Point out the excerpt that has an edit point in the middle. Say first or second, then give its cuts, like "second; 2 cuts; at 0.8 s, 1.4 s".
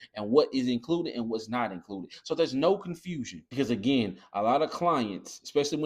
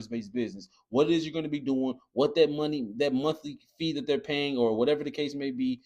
first; 1 cut; at 3.4 s